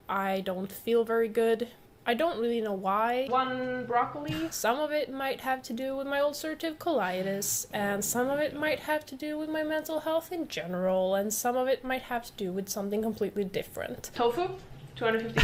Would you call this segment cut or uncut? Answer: uncut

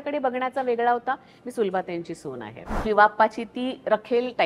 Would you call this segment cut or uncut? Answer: cut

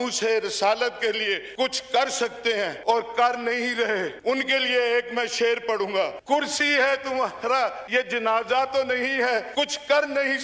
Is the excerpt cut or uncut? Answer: cut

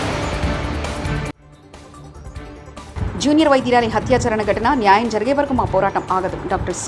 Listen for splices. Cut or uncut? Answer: cut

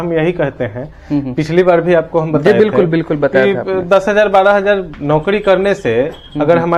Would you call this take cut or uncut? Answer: uncut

